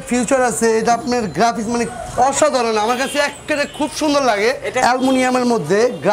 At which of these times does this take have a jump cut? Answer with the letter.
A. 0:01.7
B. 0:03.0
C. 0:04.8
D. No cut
C